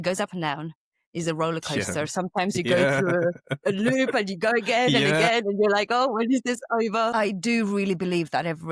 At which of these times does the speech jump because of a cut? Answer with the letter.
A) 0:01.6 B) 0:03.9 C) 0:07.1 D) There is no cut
C